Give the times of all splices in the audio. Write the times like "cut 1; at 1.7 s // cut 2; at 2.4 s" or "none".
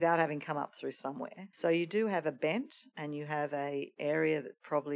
cut 1; at 1.4 s